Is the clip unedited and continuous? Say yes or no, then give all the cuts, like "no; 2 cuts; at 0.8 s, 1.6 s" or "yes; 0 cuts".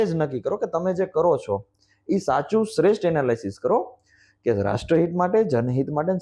yes; 0 cuts